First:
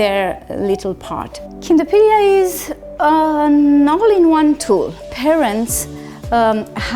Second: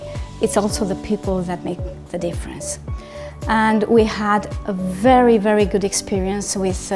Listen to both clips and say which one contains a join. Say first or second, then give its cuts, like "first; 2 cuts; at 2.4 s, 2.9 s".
first; 2 cuts; at 1.5 s, 5.0 s